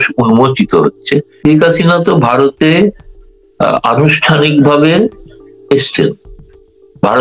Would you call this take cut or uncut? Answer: cut